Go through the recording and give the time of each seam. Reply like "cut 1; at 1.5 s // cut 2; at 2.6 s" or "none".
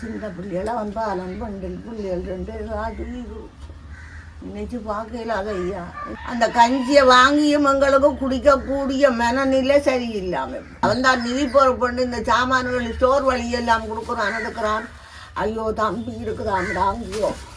cut 1; at 6.1 s // cut 2; at 10.6 s

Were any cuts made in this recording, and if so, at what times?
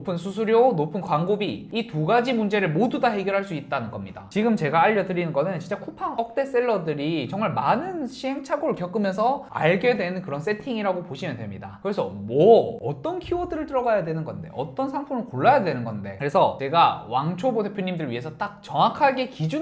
cut 1; at 4.3 s // cut 2; at 6.1 s // cut 3; at 11.8 s // cut 4; at 16.2 s

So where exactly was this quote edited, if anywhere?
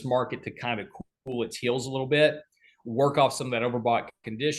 none

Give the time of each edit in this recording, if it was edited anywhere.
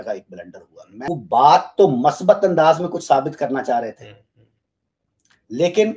cut 1; at 1.1 s

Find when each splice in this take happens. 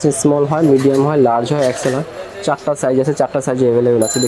none

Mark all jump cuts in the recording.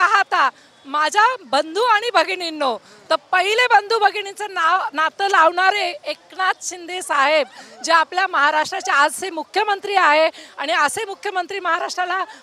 none

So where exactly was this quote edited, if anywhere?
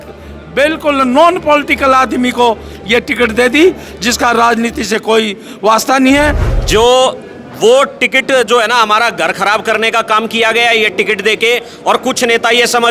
cut 1; at 6.5 s

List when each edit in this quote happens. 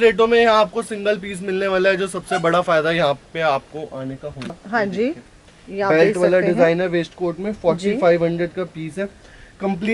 cut 1; at 4.5 s

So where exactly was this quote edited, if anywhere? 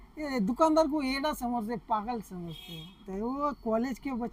cut 1; at 3.0 s

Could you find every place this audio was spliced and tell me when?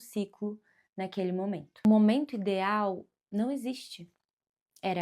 cut 1; at 1.8 s

